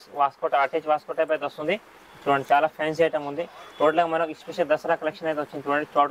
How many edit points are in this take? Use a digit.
0